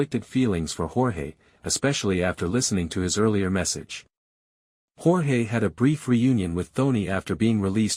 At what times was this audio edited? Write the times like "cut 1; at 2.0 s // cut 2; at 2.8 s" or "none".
none